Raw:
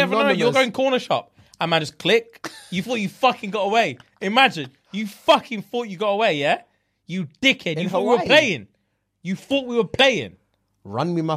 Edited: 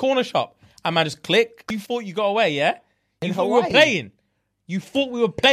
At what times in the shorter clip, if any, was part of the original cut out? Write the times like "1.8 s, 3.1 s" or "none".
1.7 s, 3.1 s